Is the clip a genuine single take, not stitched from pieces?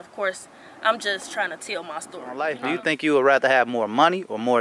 no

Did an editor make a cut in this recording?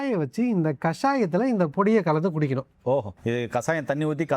yes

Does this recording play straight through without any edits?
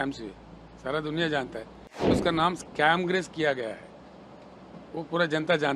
no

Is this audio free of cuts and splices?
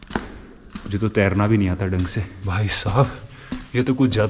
no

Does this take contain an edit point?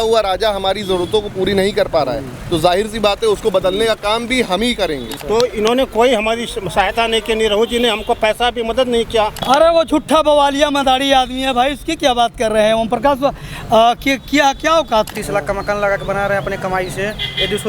yes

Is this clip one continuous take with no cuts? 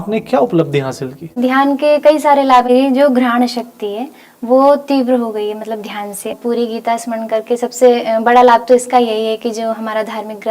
no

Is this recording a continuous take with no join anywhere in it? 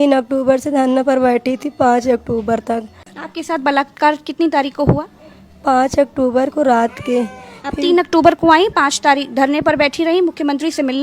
no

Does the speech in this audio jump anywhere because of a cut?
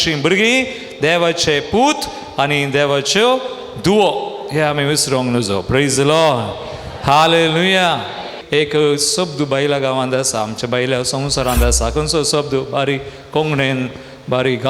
yes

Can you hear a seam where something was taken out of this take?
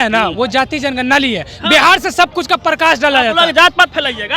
no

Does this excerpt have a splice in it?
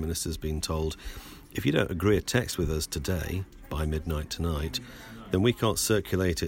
no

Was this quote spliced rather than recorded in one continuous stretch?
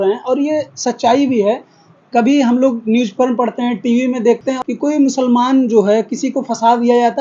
yes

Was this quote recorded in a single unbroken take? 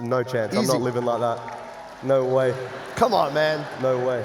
yes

